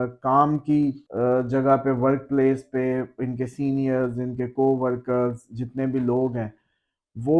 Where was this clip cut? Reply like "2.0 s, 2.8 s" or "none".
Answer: 1.0 s